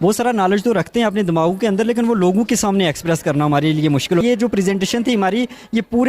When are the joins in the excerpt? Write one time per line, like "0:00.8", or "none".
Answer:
0:04.2